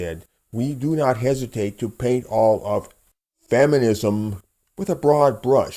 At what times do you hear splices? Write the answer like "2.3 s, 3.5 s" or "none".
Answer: 3.7 s

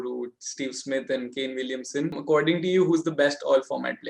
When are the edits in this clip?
2.2 s

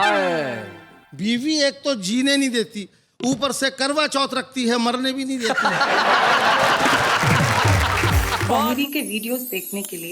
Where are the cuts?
8.5 s

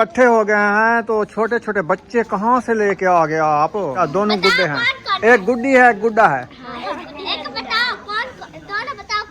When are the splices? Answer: 4.0 s

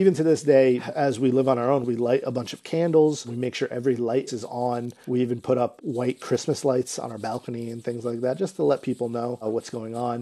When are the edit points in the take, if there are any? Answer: 0.9 s, 1.9 s, 3.3 s, 4.6 s, 5.8 s

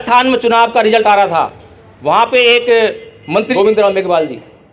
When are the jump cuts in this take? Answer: 3.5 s

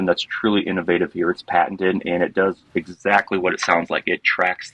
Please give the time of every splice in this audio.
none

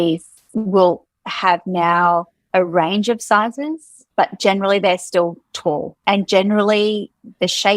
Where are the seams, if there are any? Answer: 5.9 s

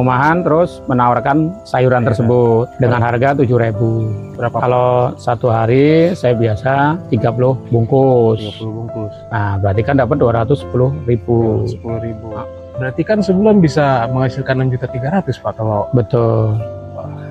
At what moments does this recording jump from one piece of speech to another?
1.6 s, 2.7 s, 4.2 s, 7.4 s, 12.2 s

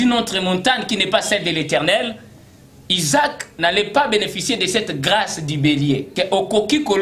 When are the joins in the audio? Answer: 6.1 s

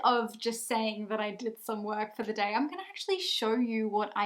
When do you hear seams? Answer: none

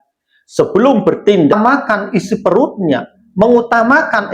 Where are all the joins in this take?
1.5 s

